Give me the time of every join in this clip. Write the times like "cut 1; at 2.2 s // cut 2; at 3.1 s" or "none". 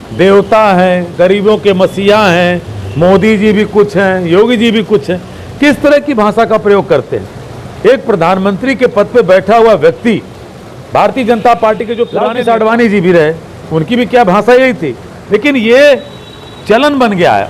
cut 1; at 12.2 s